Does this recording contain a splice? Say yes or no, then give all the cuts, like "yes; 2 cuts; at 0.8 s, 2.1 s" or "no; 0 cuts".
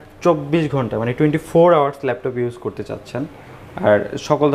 no; 0 cuts